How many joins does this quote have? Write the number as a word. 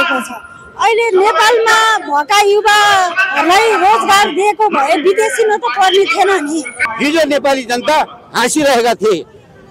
one